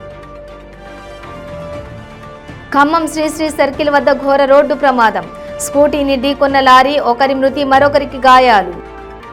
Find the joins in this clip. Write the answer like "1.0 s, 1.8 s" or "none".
none